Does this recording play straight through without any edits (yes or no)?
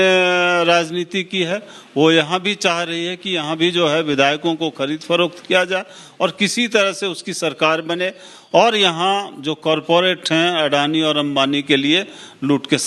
yes